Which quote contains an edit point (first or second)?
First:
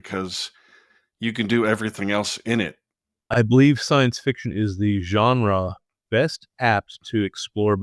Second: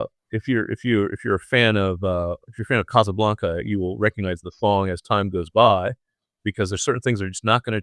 first